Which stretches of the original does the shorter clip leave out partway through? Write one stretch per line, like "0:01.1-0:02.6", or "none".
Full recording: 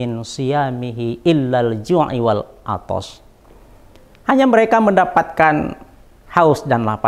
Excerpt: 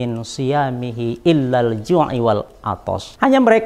0:02.6-0:03.6